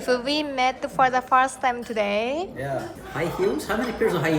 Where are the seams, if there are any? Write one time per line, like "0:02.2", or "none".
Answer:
0:02.9